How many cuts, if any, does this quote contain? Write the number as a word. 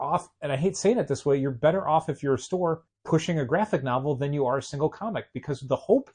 one